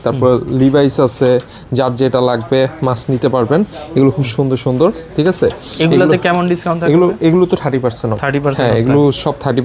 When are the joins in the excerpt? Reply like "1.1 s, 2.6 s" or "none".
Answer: none